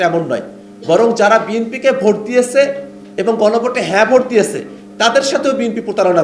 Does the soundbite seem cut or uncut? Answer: uncut